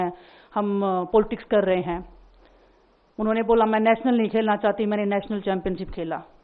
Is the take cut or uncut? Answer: uncut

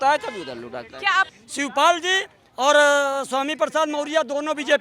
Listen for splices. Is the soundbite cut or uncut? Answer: cut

